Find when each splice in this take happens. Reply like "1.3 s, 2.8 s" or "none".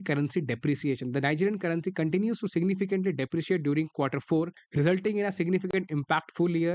4.6 s